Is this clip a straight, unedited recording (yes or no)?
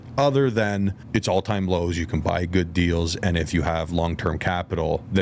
no